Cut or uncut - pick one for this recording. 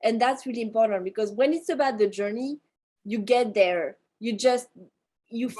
uncut